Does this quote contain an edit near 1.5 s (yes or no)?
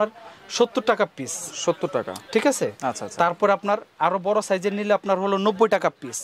no